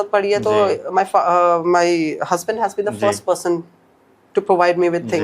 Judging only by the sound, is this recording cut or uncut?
uncut